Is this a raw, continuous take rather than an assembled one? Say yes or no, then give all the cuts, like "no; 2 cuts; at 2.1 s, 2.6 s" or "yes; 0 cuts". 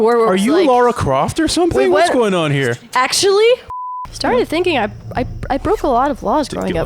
no; 1 cut; at 3.7 s